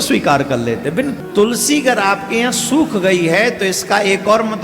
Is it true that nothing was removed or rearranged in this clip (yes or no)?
no